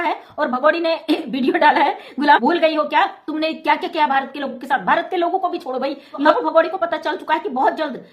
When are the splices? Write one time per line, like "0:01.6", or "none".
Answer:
0:02.4
0:06.3